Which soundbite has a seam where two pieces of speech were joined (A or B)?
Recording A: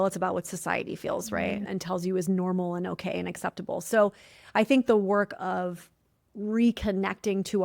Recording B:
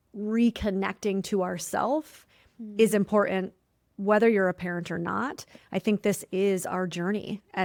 A